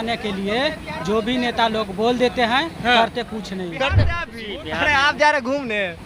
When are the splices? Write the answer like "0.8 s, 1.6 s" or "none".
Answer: 4.2 s